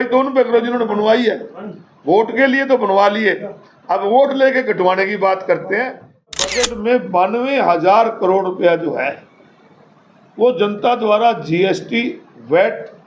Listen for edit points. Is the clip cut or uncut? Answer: cut